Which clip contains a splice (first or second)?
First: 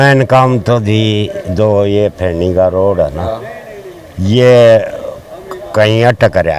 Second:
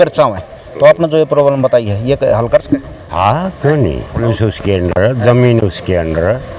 second